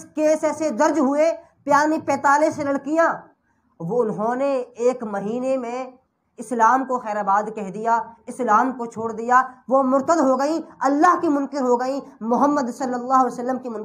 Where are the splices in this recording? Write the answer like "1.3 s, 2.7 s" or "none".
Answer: none